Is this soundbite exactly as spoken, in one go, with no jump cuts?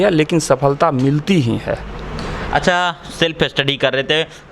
yes; 0 cuts

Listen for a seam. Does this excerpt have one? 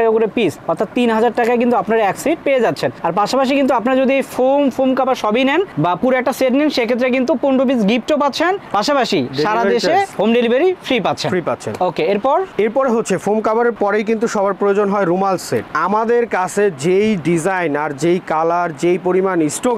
no; 0 cuts

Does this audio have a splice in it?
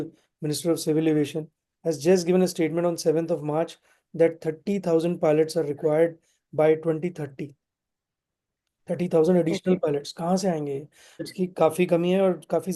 yes; 1 cut; at 11.2 s

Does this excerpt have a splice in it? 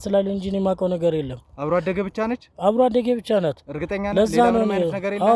no; 0 cuts

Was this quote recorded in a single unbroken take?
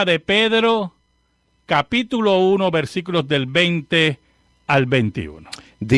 yes; 0 cuts

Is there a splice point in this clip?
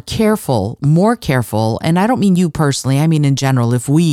no; 0 cuts

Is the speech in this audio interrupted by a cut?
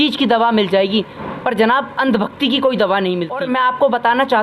yes; 1 cut; at 3.4 s

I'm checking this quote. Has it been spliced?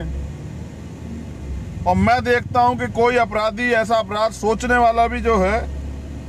no; 0 cuts

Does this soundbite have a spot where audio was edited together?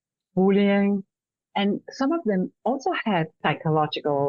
yes; 1 cut; at 3.4 s

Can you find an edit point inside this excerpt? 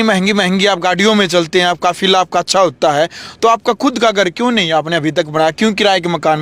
no; 0 cuts

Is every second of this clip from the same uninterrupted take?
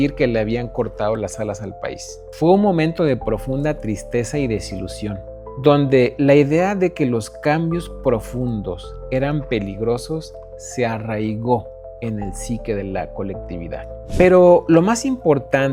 yes; 0 cuts

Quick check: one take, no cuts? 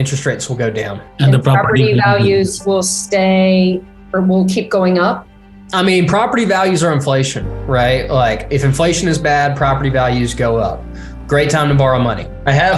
no; 1 cut; at 1.0 s

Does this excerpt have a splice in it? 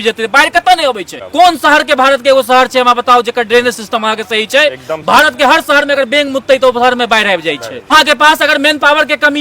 yes; 2 cuts; at 1.1 s, 7.9 s

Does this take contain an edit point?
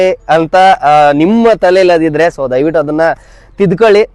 no; 0 cuts

